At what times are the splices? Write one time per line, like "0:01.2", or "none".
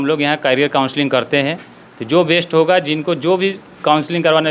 none